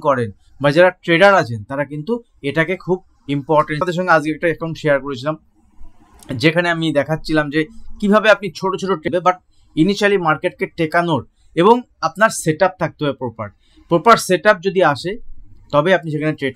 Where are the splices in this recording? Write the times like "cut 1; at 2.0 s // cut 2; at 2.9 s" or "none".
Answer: cut 1; at 3.8 s // cut 2; at 9.0 s